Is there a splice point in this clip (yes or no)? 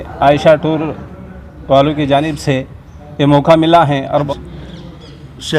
yes